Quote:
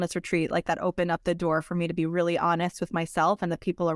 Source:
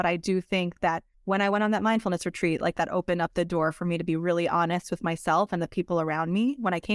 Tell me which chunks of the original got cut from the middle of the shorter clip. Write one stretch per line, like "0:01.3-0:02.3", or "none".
none